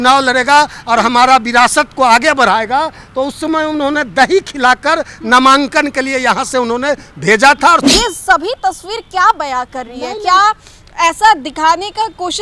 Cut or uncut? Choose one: cut